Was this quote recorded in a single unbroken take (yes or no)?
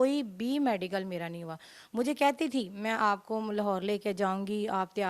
yes